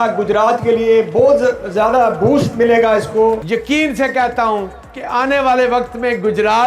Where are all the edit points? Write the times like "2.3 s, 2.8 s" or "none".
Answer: 3.4 s